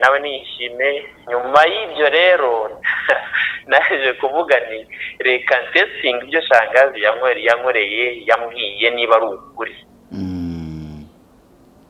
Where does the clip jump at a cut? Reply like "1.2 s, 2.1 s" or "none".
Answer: 1.1 s